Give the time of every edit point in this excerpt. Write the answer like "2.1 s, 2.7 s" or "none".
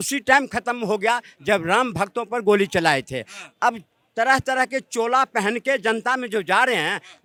none